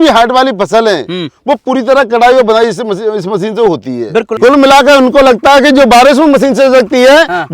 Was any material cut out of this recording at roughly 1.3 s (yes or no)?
no